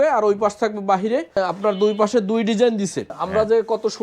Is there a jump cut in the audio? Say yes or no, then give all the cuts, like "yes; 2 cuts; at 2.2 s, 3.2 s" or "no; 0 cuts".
yes; 2 cuts; at 1.3 s, 3.2 s